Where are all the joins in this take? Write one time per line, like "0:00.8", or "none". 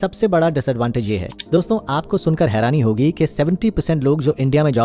0:01.3